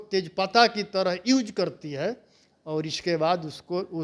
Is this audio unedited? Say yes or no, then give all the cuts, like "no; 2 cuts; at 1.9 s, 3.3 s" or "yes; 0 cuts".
yes; 0 cuts